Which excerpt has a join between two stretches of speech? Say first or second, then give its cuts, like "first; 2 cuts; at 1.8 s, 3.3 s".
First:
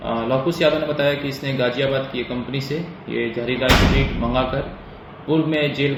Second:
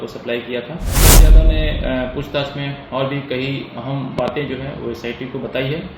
second; 1 cut; at 1.2 s